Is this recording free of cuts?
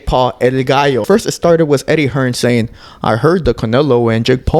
no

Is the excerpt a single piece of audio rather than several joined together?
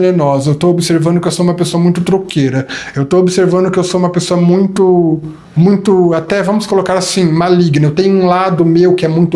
no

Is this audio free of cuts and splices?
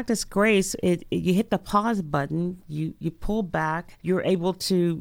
no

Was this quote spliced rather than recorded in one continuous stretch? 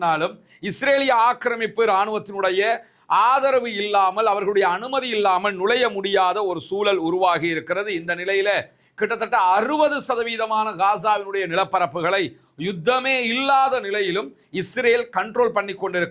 no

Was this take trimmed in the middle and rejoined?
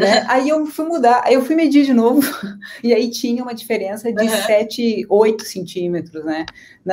no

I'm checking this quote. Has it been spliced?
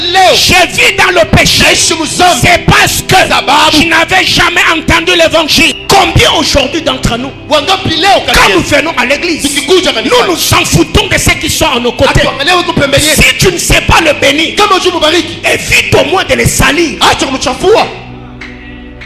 yes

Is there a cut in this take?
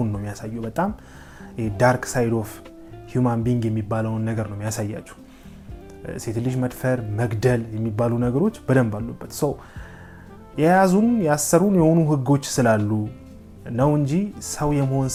no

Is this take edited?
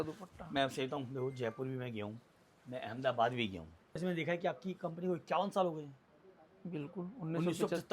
yes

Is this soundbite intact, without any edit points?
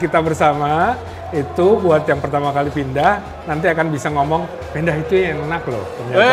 yes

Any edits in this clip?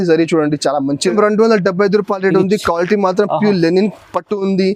yes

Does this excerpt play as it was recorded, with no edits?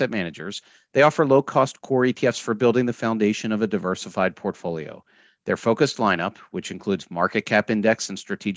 yes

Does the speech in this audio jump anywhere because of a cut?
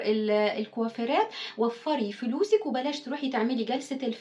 no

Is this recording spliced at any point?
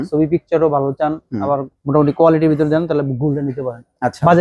no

